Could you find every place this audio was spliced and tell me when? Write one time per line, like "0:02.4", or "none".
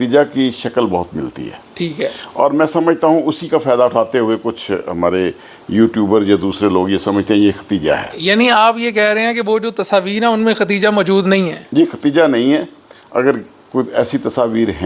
none